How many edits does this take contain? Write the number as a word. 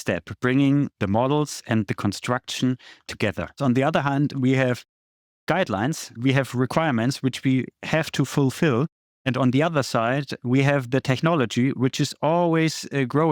two